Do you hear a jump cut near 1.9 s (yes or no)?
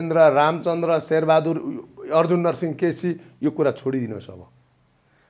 no